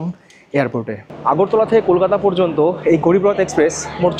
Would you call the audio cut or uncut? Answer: cut